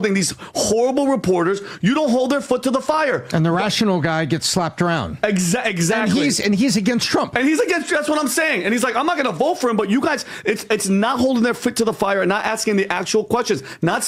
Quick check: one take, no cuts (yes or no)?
yes